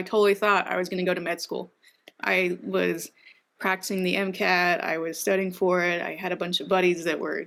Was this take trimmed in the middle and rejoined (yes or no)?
no